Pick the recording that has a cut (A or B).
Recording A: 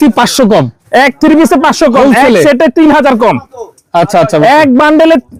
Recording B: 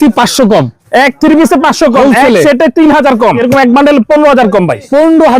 B